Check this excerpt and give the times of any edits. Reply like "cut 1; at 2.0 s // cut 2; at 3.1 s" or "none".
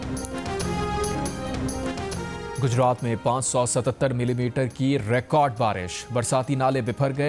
cut 1; at 1.1 s